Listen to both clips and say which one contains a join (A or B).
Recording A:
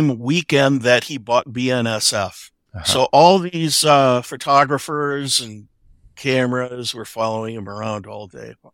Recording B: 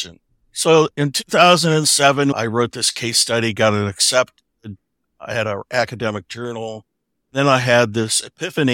B